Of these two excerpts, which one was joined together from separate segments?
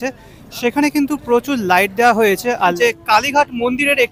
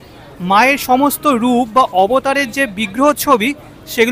first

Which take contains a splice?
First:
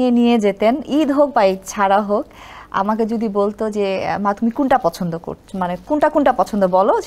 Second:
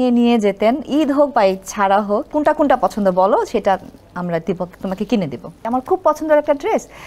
second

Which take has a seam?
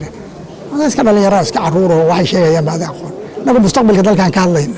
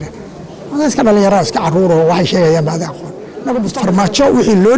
second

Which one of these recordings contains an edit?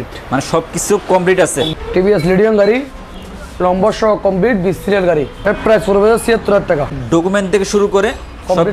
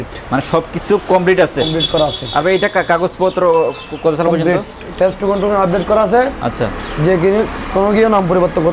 first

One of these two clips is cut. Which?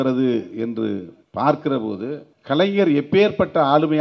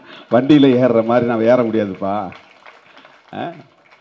first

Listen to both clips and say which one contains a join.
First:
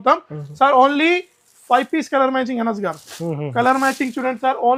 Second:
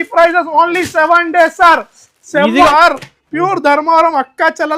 second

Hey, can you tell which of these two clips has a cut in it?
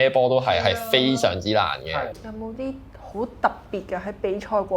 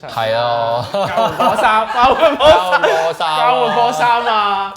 first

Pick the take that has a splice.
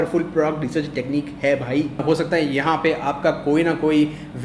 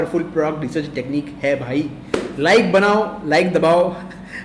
first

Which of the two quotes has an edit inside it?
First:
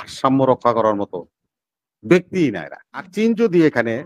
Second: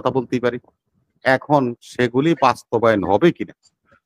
first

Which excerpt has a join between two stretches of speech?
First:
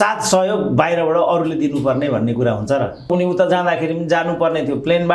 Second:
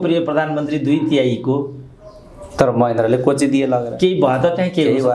first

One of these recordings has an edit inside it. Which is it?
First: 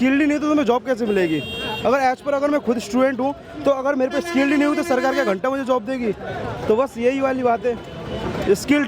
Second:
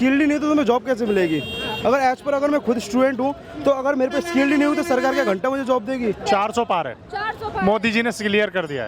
second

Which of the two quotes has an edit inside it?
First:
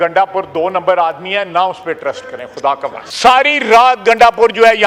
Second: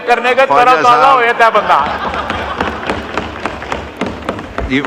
first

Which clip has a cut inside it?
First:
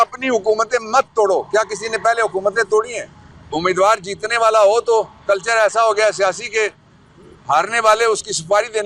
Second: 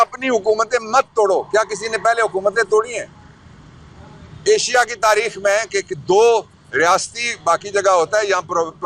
first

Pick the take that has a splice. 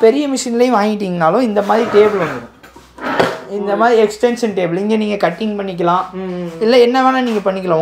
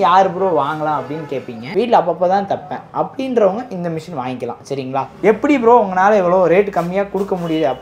second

